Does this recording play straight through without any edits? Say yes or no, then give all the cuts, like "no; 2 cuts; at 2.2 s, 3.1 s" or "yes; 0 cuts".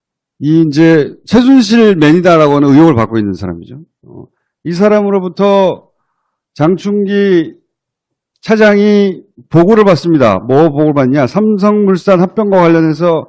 no; 1 cut; at 5.7 s